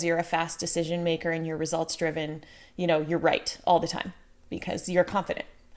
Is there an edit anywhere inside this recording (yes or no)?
no